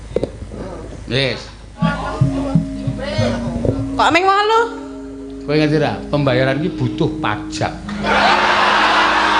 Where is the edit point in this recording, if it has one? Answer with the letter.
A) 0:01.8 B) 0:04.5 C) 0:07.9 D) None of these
A